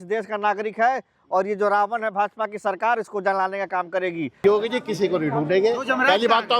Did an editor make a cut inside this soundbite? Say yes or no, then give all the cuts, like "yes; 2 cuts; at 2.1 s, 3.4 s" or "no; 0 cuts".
yes; 1 cut; at 4.4 s